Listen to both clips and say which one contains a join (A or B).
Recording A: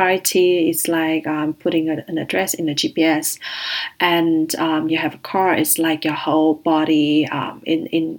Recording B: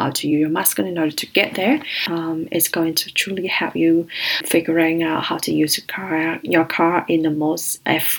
B